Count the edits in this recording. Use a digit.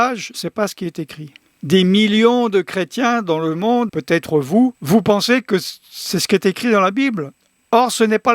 3